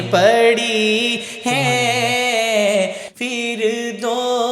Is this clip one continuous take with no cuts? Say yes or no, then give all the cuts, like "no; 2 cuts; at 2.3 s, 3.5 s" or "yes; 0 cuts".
yes; 0 cuts